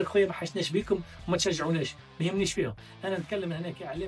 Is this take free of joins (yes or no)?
yes